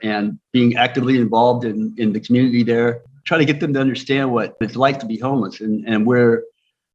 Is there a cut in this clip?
yes; 2 cuts; at 3.1 s, 4.6 s

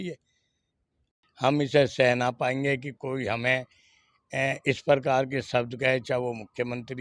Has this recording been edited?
yes; 1 cut; at 1.1 s

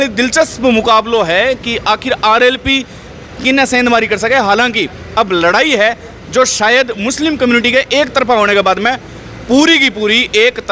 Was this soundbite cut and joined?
no; 0 cuts

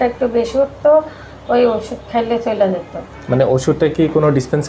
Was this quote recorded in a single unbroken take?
yes; 0 cuts

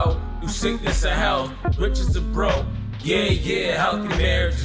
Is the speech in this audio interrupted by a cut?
no; 0 cuts

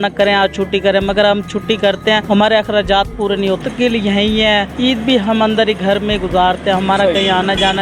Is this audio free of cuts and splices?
no; 3 cuts; at 2.2 s, 3.6 s, 4.7 s

